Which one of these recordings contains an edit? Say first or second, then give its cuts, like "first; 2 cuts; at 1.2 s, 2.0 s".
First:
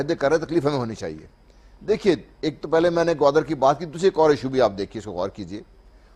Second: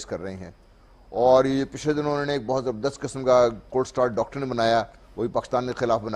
second; 1 cut; at 2.4 s